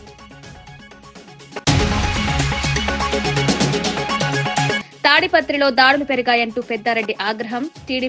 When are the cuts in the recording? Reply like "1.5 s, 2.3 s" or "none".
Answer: 1.6 s, 4.8 s